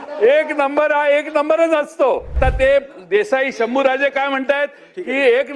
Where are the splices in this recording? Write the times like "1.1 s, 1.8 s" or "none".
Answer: 2.3 s